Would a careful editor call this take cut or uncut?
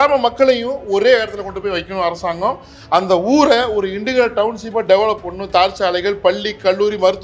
uncut